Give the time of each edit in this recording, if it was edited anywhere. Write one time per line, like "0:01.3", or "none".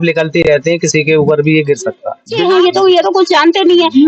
0:02.4